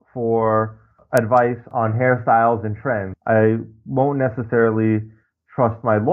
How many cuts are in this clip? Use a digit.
3